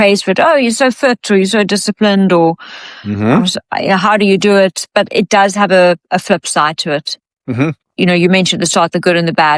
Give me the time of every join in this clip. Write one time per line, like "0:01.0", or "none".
none